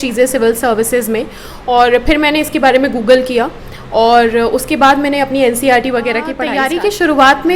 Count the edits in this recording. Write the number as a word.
one